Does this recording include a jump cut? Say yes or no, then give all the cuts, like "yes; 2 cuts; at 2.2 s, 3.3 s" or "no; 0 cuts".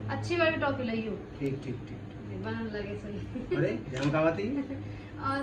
no; 0 cuts